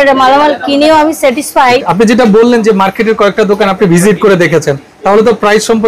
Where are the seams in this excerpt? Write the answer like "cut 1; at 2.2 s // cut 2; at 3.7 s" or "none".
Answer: cut 1; at 1.9 s